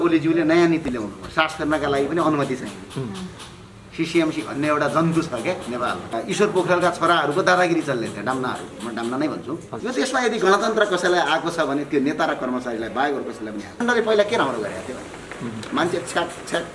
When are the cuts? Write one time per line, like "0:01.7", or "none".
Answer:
0:06.1
0:09.7
0:13.8